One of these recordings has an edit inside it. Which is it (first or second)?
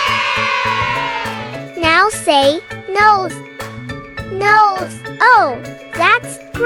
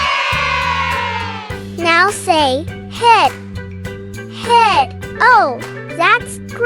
second